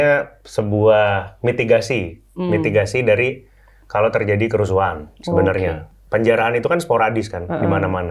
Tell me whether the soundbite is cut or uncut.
cut